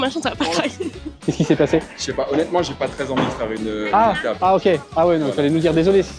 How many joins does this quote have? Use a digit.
1